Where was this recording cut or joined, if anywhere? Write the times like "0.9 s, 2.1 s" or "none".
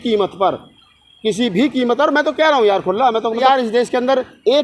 3.4 s